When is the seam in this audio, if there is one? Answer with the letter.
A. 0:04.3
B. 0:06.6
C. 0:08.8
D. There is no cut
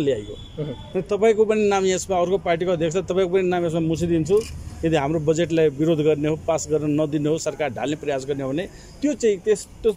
D